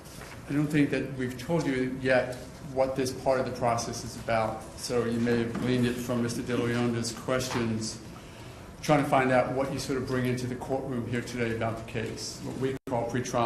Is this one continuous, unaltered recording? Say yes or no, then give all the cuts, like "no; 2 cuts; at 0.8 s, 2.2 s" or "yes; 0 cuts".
yes; 0 cuts